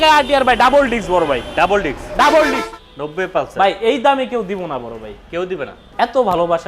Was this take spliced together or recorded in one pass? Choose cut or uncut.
cut